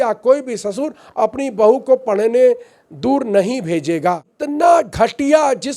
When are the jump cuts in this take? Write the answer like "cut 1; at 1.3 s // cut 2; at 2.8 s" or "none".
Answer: cut 1; at 4.3 s